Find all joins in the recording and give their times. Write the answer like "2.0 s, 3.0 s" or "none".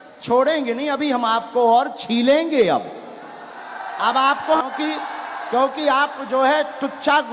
4.6 s